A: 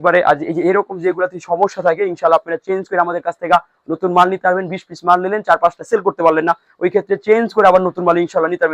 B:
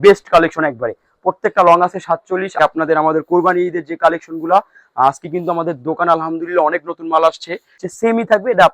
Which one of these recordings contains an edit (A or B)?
B